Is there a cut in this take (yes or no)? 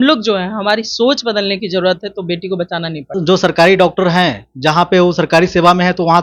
yes